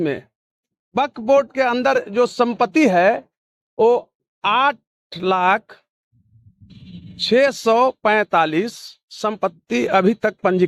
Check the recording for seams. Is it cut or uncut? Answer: uncut